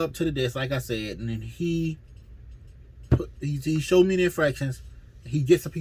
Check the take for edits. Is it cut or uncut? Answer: uncut